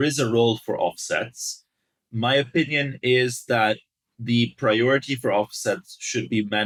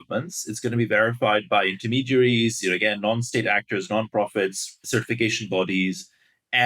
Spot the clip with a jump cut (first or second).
second